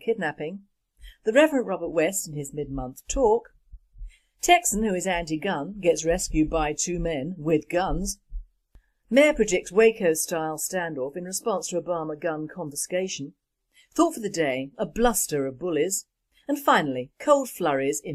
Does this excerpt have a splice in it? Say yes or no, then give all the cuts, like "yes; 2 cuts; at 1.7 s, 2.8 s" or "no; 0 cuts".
yes; 1 cut; at 13.2 s